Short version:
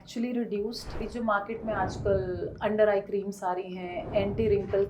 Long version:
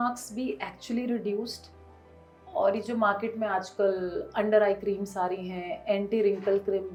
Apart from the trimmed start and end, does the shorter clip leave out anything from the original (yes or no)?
yes